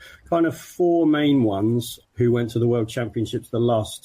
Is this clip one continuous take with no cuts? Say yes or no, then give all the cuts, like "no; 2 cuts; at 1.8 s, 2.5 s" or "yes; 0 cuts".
no; 1 cut; at 2.0 s